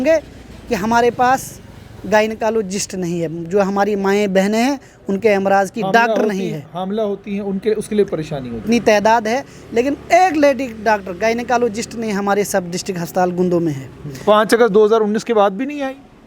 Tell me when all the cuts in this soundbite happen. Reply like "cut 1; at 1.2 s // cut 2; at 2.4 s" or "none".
cut 1; at 8.6 s

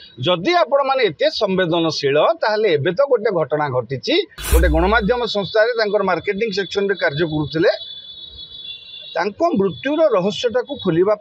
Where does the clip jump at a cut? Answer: cut 1; at 4.4 s

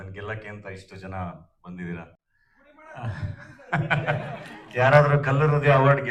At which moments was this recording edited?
none

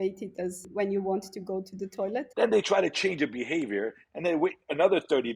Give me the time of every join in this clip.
cut 1; at 2.2 s

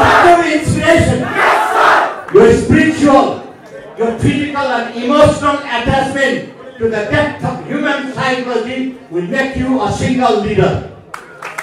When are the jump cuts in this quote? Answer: cut 1; at 2.2 s

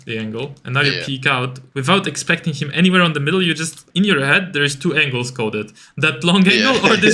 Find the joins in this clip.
cut 1; at 1.6 s // cut 2; at 3.8 s

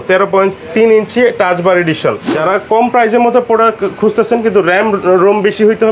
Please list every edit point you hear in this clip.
none

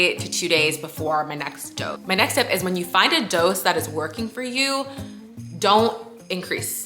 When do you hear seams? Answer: cut 1; at 2.0 s

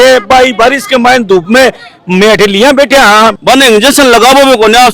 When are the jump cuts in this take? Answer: cut 1; at 3.4 s

